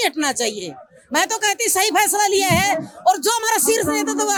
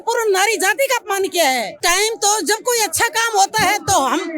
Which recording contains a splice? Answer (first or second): second